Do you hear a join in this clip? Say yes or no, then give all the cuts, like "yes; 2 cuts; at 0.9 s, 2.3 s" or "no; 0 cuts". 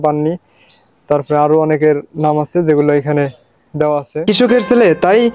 yes; 1 cut; at 4.2 s